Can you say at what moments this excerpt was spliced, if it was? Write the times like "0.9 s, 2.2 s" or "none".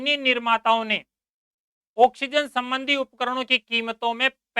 none